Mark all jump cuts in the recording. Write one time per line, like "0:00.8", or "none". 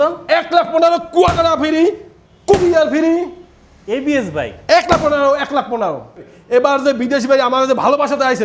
0:06.2